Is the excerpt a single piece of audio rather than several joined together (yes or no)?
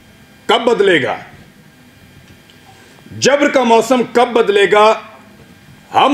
yes